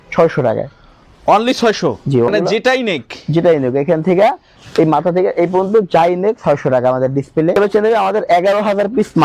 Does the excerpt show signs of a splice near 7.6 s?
yes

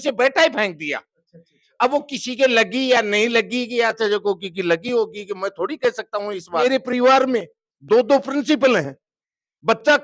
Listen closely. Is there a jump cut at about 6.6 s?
yes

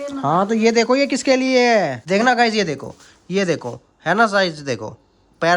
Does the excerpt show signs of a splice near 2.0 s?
yes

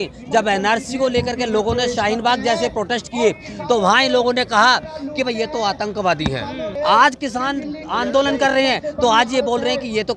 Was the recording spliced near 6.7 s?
yes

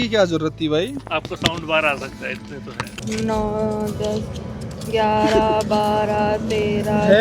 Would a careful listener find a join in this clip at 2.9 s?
yes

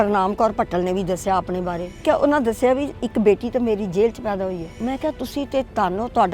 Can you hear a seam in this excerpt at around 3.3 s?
no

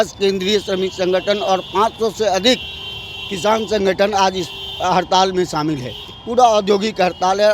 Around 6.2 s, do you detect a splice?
no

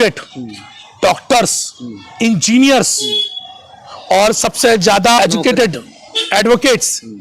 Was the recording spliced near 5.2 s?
yes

